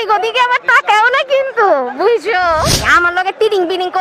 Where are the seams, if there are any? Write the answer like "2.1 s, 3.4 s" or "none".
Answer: 2.8 s